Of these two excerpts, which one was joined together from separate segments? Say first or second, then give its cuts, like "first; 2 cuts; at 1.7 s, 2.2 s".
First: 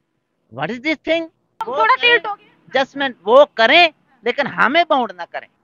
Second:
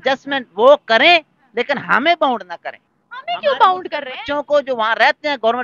first; 1 cut; at 1.5 s